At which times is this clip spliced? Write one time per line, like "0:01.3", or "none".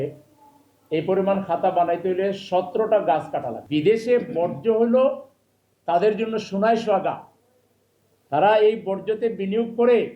0:03.6